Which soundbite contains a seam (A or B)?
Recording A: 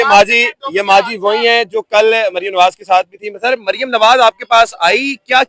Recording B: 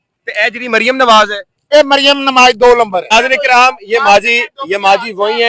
B